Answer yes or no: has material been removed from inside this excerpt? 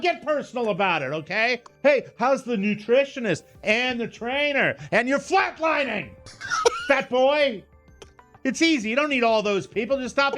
yes